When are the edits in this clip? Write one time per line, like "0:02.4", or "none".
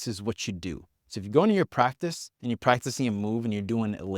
0:02.3